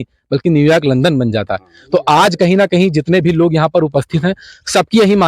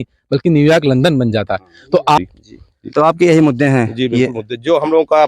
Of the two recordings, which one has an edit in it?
second; 1 cut; at 2.2 s

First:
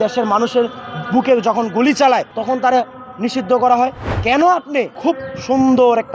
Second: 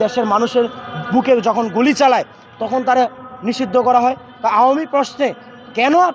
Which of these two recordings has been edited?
first; 3 cuts; at 2.3 s, 4.0 s, 4.9 s

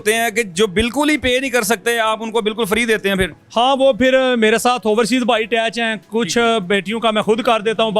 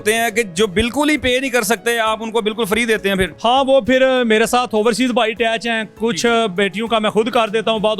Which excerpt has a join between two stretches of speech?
second; 1 cut; at 3.3 s

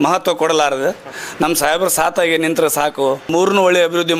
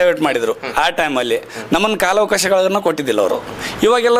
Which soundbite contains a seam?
first; 1 cut; at 3.3 s

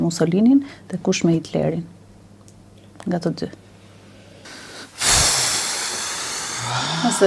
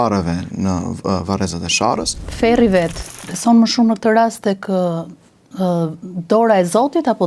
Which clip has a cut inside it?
second; 2 cuts; at 2.2 s, 3.0 s

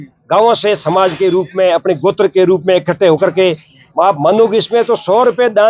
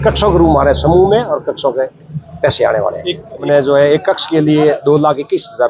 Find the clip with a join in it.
second; 1 cut; at 3.5 s

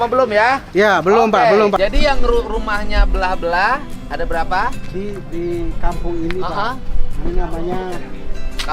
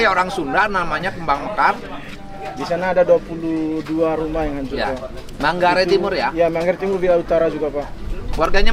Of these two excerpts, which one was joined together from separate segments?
first; 1 cut; at 1.8 s

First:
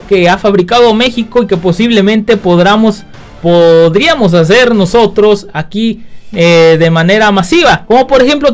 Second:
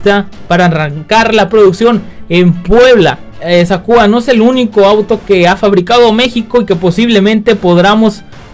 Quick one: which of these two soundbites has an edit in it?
second; 1 cut; at 3.3 s

